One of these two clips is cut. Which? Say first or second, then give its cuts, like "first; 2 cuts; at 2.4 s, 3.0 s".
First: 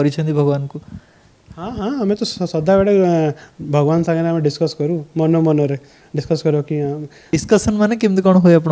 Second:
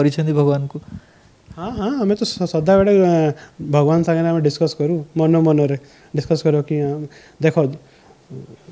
first; 1 cut; at 7.2 s